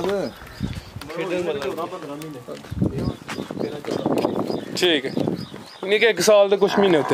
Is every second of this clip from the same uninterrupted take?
yes; 0 cuts

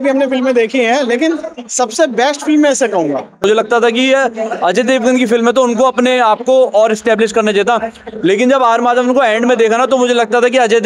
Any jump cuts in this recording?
yes; 1 cut; at 3.4 s

